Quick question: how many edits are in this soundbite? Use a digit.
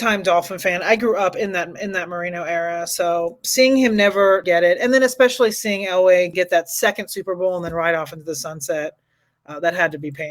2